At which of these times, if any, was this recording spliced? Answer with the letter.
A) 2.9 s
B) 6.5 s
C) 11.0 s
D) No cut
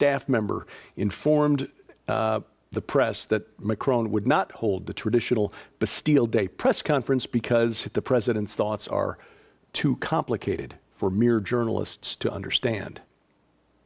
B